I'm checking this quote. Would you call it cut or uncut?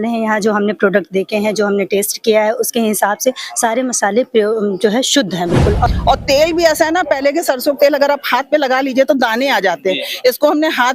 cut